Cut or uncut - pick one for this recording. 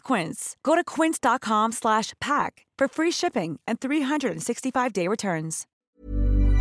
cut